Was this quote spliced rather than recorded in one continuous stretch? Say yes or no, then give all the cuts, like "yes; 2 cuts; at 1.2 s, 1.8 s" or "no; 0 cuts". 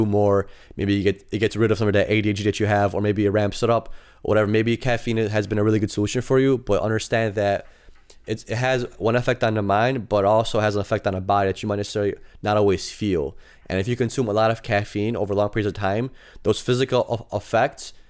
no; 0 cuts